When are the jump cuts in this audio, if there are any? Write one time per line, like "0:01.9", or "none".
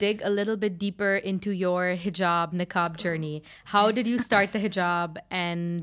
none